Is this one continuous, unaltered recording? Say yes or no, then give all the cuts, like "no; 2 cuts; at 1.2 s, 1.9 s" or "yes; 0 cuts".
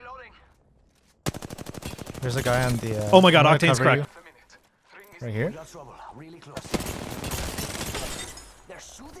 no; 1 cut; at 4.0 s